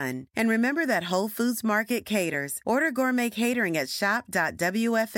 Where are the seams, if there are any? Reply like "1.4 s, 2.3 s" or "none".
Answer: none